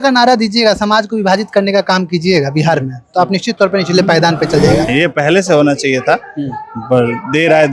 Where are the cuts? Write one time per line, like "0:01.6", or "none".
0:04.9